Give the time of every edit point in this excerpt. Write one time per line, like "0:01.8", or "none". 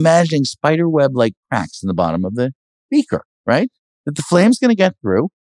none